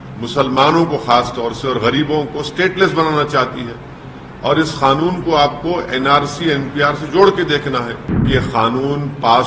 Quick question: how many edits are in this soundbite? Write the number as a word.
one